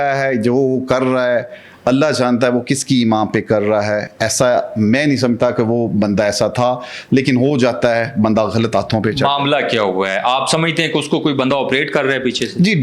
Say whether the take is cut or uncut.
uncut